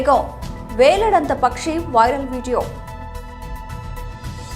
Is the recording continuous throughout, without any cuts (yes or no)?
no